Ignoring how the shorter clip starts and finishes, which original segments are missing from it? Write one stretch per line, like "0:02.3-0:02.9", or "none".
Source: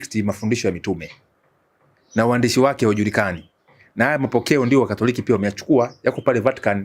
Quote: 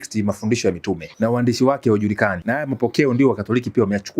0:01.1-0:02.0
0:03.4-0:03.9